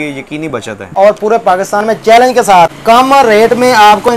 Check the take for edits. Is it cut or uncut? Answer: cut